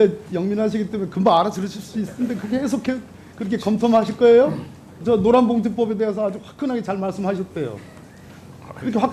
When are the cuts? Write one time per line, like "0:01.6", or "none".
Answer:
0:05.0